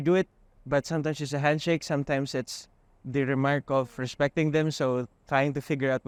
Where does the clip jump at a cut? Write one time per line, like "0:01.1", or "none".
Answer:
none